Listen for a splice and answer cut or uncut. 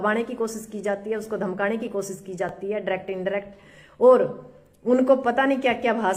uncut